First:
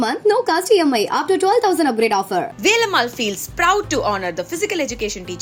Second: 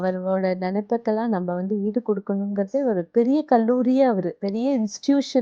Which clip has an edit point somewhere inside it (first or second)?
second